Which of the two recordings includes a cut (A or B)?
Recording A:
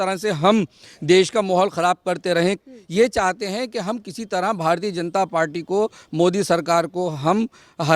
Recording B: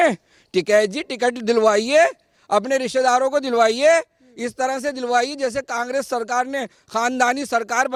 A